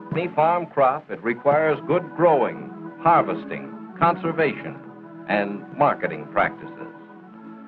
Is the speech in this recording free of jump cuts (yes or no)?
yes